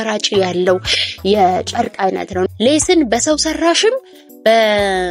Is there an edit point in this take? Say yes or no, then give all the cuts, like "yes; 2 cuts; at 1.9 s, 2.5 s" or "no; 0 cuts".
yes; 1 cut; at 2.5 s